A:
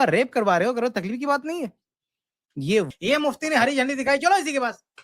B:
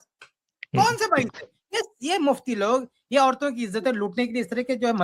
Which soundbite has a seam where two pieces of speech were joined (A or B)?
A